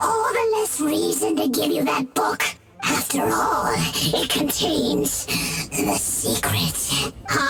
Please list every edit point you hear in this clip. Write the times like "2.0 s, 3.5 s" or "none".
none